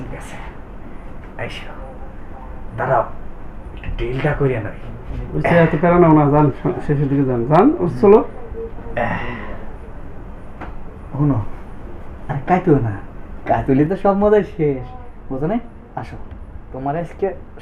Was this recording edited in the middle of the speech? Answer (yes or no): no